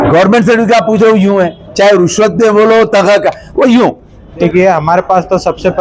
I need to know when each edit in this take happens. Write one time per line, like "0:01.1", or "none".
0:04.4